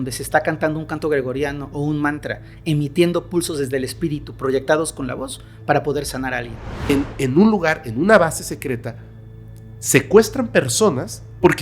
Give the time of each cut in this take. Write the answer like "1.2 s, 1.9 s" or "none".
6.8 s